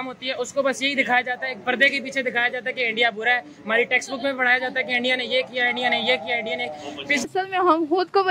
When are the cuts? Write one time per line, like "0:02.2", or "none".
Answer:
0:07.3